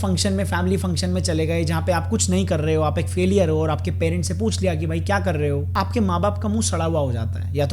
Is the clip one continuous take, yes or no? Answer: no